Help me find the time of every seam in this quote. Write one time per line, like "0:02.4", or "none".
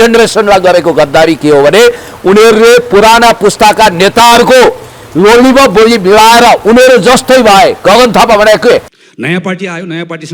0:08.9